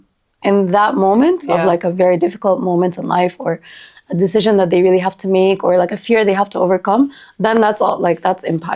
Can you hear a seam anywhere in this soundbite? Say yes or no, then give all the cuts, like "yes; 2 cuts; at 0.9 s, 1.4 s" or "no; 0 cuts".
no; 0 cuts